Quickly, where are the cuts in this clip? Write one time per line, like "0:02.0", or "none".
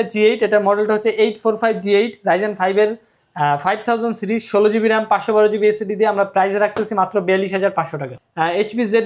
0:08.1